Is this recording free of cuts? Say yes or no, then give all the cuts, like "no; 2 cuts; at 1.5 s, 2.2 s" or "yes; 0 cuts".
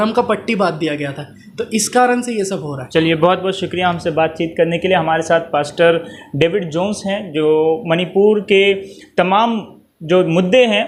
yes; 0 cuts